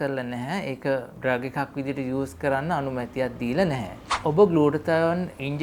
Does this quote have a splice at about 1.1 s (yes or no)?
yes